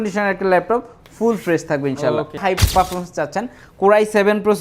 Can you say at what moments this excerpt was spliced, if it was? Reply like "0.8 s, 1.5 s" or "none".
2.4 s